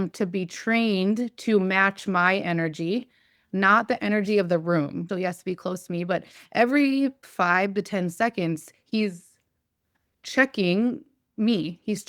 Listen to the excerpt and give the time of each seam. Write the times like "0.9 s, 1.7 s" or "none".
5.0 s, 7.3 s